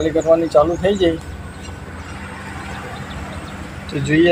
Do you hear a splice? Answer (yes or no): no